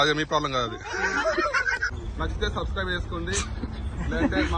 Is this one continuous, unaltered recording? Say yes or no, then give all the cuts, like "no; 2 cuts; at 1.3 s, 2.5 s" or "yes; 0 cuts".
no; 1 cut; at 1.9 s